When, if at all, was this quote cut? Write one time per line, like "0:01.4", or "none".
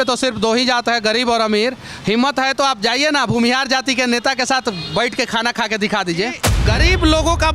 0:06.5